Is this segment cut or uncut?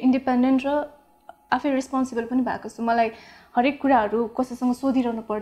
uncut